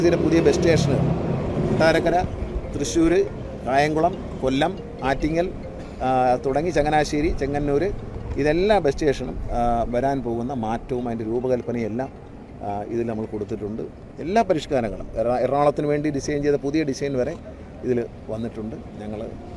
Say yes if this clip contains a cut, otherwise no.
no